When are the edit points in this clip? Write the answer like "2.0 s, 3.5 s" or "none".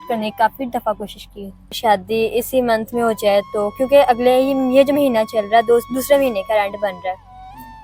1.8 s